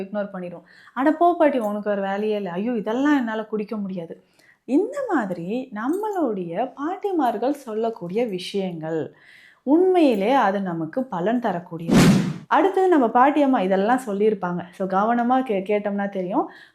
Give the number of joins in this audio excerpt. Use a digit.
1